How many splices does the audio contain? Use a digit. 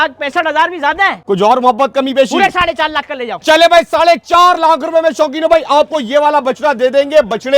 1